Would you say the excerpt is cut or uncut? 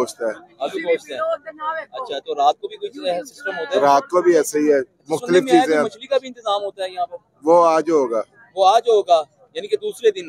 uncut